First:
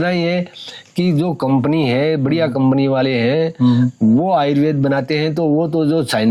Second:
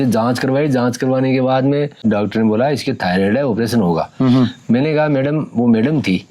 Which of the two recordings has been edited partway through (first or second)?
second